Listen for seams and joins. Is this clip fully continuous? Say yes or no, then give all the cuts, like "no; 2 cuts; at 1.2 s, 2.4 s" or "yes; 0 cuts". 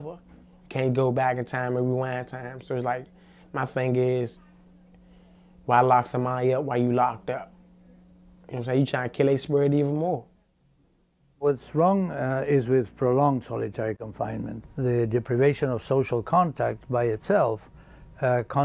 yes; 0 cuts